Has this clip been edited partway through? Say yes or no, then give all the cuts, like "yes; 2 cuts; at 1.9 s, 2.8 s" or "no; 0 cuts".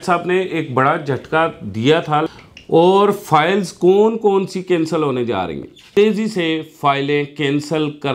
yes; 2 cuts; at 2.3 s, 5.8 s